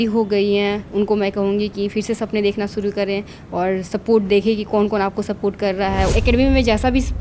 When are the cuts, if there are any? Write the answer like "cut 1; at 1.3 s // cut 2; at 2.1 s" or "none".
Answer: cut 1; at 6.1 s